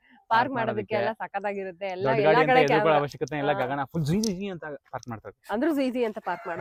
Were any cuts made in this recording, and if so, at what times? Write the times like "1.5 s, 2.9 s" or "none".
none

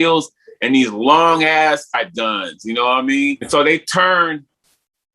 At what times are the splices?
1.9 s, 3.4 s

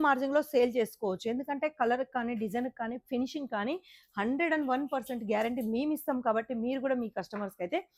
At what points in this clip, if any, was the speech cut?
none

